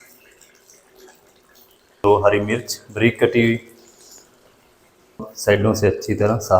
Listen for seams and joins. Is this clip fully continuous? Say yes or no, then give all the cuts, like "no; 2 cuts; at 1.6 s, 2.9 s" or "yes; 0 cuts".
no; 2 cuts; at 1.9 s, 5.3 s